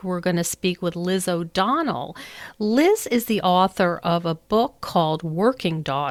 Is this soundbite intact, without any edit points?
yes; 0 cuts

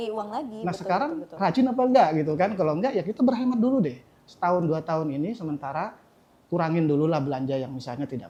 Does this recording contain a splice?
no; 0 cuts

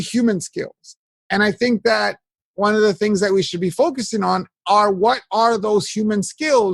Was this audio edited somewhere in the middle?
no; 0 cuts

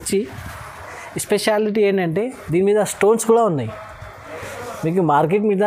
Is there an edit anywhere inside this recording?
no; 0 cuts

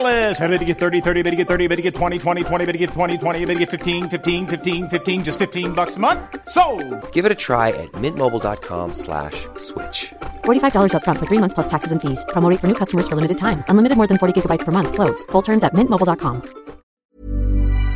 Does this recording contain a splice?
yes; 1 cut; at 17.0 s

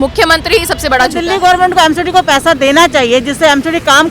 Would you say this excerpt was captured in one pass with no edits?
no; 1 cut; at 1.2 s

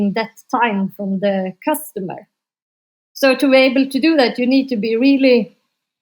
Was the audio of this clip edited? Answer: no; 0 cuts

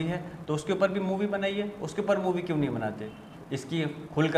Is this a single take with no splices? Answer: no; 1 cut; at 3.2 s

